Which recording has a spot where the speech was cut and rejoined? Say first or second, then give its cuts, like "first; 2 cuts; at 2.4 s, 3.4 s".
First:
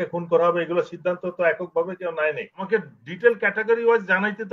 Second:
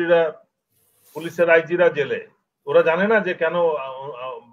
first; 1 cut; at 2.6 s